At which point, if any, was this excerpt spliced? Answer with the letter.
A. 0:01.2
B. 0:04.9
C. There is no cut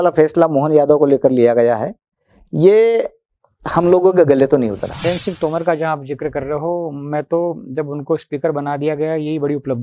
B